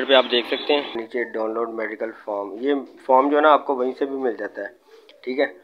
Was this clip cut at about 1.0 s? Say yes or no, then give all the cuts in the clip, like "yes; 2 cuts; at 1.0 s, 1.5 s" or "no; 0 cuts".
yes; 1 cut; at 1.0 s